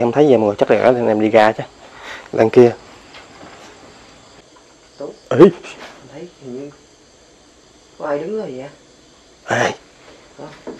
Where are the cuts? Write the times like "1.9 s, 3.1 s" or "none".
4.4 s